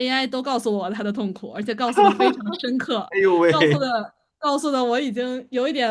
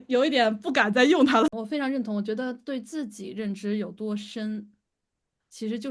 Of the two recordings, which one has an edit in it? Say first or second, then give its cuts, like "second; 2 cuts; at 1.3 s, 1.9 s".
second; 1 cut; at 1.6 s